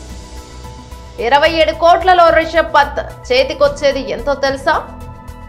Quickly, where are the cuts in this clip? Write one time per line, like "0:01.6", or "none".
none